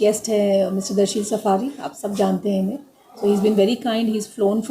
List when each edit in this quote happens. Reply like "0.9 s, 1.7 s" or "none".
none

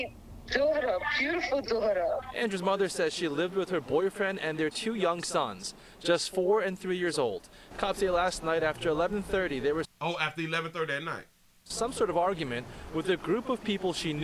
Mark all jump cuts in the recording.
none

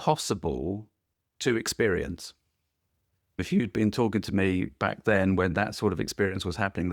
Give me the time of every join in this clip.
3.4 s

